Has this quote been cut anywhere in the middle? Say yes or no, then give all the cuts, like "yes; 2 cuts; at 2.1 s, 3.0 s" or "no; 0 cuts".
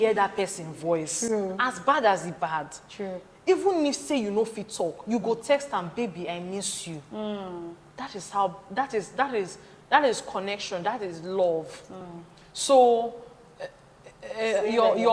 no; 0 cuts